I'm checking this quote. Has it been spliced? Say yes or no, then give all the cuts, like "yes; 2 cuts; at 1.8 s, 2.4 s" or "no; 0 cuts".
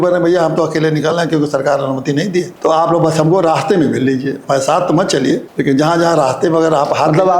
yes; 2 cuts; at 2.5 s, 5.5 s